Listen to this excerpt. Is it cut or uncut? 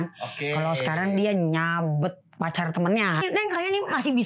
cut